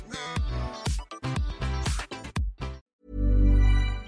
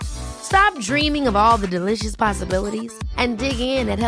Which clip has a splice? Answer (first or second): first